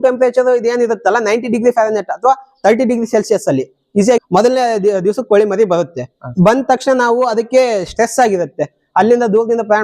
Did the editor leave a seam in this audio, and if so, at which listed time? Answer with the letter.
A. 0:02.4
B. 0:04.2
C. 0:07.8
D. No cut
B